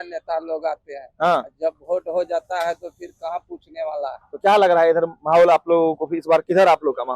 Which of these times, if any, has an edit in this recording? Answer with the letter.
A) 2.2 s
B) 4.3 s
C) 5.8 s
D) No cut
D